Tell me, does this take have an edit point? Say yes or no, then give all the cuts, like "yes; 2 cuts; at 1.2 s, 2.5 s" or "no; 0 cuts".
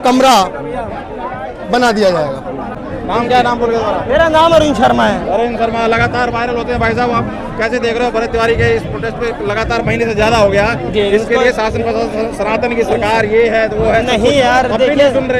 no; 0 cuts